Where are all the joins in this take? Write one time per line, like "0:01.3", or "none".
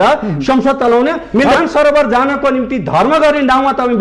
0:01.5